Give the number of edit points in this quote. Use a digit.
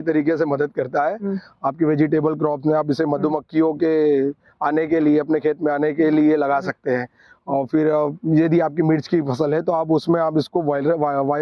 0